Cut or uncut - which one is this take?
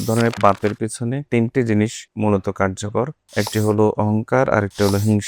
cut